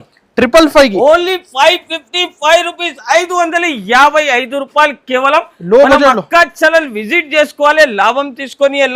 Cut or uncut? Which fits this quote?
uncut